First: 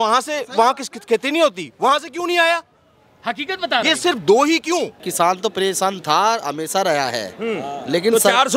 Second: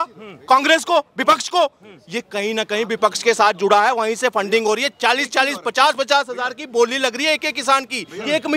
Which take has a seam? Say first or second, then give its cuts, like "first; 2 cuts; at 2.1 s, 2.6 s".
first; 1 cut; at 5.0 s